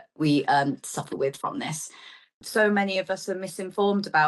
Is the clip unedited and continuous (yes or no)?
no